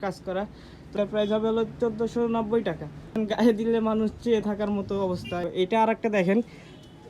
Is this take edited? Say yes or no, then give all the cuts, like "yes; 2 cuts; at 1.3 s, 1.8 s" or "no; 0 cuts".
yes; 3 cuts; at 1.0 s, 3.1 s, 5.4 s